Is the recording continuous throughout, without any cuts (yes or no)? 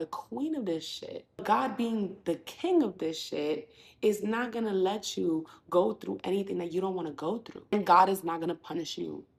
no